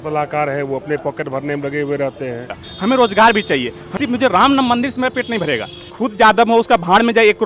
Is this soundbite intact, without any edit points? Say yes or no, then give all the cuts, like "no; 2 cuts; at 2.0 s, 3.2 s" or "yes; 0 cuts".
no; 3 cuts; at 2.6 s, 3.8 s, 5.9 s